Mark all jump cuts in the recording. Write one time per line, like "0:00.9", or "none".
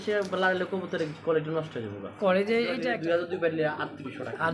0:02.9